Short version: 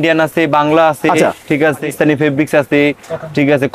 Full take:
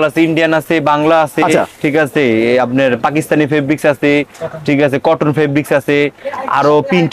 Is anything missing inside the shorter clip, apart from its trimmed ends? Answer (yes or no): yes